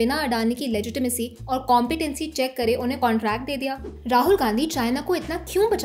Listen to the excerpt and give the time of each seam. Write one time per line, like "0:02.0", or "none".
0:03.9